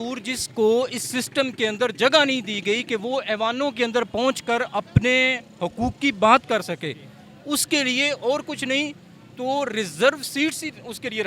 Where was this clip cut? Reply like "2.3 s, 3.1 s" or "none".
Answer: none